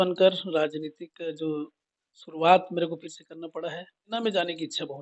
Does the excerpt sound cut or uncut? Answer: cut